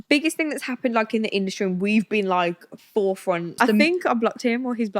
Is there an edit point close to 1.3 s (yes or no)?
no